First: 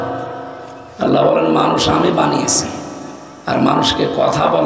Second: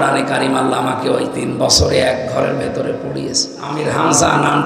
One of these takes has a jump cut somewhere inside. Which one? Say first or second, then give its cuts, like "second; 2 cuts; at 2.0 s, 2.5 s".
second; 1 cut; at 3.7 s